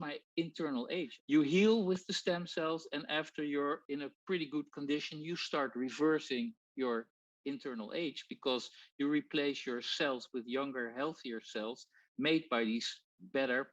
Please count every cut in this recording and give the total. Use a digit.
1